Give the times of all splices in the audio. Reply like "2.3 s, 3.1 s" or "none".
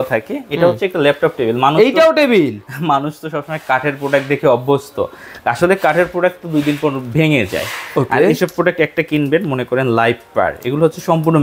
none